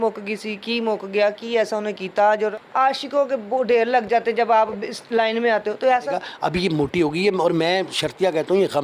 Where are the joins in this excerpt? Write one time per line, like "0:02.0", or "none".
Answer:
0:02.5
0:06.2